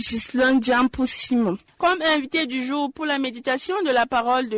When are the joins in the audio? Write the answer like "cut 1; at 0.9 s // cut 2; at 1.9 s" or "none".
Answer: cut 1; at 1.7 s